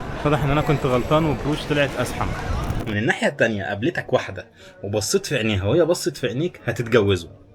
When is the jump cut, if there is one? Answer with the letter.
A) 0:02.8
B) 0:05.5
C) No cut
A